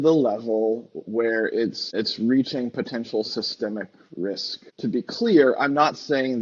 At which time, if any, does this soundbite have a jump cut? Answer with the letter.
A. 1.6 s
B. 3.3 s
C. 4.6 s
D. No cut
C